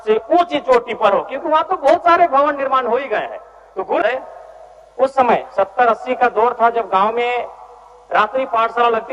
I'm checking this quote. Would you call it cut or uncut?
cut